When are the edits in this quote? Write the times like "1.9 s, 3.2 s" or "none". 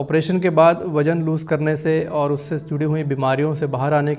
none

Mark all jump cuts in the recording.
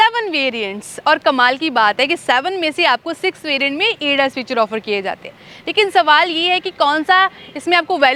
none

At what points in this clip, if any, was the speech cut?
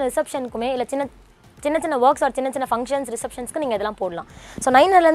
none

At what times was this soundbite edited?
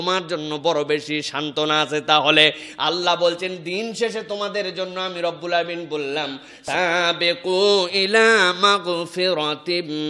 none

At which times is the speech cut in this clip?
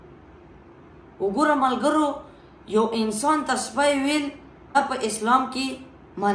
4.8 s

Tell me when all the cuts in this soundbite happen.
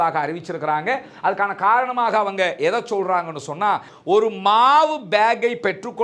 3.9 s

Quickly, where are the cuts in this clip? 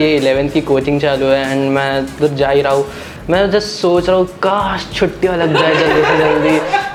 none

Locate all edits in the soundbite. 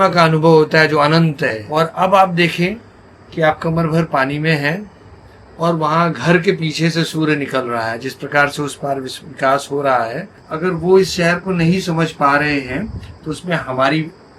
1.6 s, 10.4 s

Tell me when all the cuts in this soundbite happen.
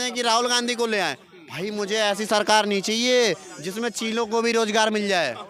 none

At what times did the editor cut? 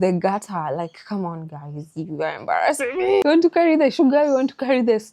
3.2 s

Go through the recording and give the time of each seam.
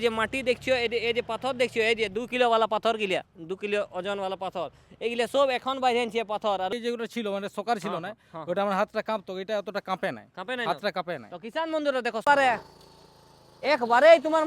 6.7 s, 12.2 s

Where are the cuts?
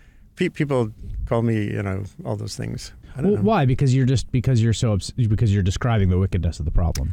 2.9 s

